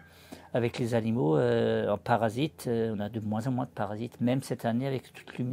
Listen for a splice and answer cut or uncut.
uncut